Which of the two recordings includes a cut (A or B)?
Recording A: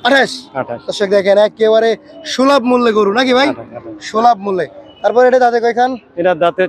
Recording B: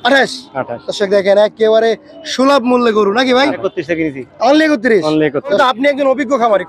B